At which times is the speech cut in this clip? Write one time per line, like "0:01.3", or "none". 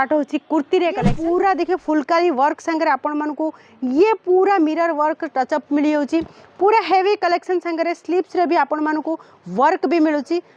0:01.1